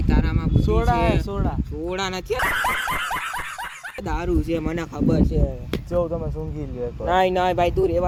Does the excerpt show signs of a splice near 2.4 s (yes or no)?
no